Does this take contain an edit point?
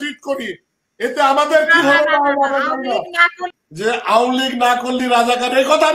yes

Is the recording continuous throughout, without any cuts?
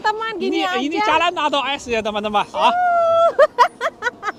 yes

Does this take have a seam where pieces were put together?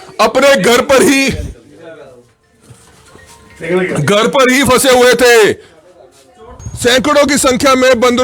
yes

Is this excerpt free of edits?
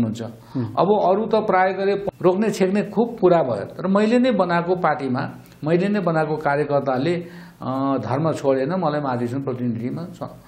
no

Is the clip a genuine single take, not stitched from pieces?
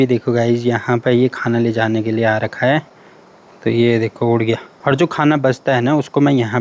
yes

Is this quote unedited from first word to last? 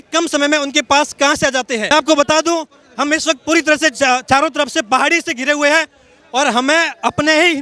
no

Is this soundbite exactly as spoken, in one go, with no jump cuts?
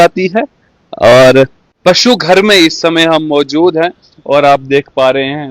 no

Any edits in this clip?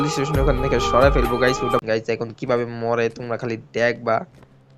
yes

